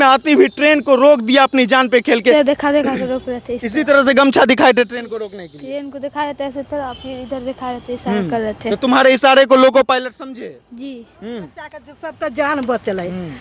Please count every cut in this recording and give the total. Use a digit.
2